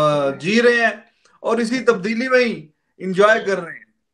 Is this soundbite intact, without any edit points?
yes; 0 cuts

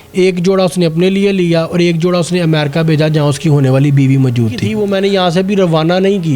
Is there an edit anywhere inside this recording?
yes; 1 cut; at 4.7 s

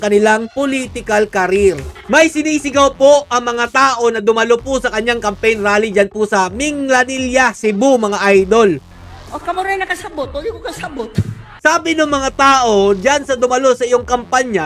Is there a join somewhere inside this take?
yes; 3 cuts; at 1.9 s, 8.9 s, 11.5 s

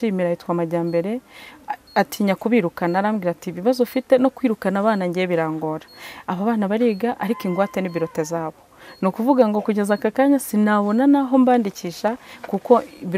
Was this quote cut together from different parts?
no; 0 cuts

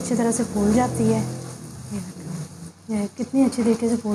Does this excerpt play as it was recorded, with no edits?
no; 1 cut; at 2.7 s

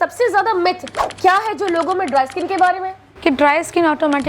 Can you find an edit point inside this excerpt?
yes; 1 cut; at 2.9 s

